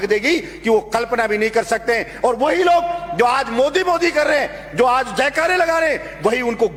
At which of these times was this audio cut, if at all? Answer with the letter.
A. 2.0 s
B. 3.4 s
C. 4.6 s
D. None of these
D